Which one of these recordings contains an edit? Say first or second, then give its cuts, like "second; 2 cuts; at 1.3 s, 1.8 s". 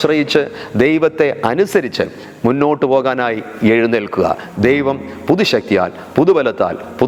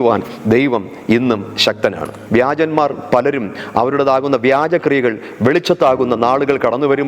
second; 1 cut; at 2.2 s